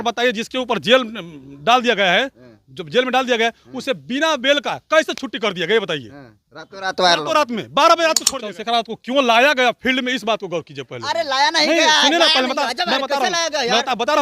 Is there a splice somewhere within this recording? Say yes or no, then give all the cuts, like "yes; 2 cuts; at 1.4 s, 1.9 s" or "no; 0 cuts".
yes; 1 cut; at 8.3 s